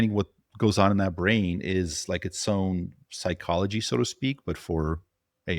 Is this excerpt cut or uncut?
uncut